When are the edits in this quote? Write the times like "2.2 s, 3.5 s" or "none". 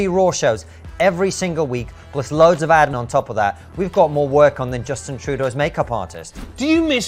3.0 s